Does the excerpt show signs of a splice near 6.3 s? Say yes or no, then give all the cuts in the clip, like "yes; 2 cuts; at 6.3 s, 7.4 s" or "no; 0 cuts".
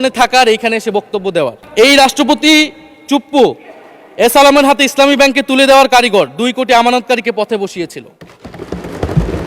no; 1 cut; at 1.6 s